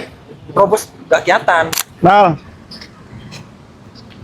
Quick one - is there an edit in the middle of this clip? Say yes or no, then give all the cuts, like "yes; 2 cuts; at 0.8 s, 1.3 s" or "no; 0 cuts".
yes; 1 cut; at 1.9 s